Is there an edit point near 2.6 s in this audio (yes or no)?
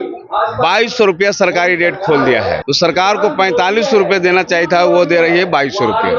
yes